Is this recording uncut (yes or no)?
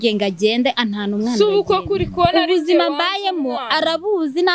yes